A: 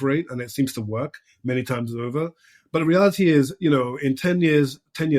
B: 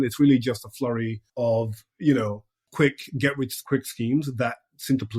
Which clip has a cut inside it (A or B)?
B